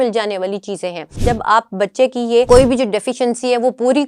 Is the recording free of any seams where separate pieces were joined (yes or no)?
no